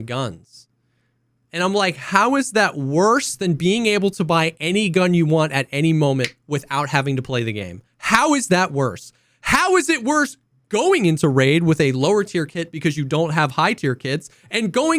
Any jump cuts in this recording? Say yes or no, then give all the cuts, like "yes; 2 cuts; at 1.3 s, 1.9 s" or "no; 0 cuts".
no; 0 cuts